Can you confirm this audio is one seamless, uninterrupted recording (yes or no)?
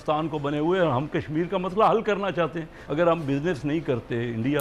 no